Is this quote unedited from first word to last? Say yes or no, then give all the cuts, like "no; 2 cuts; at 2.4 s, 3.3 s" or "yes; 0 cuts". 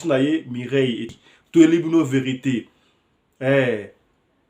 no; 1 cut; at 1.1 s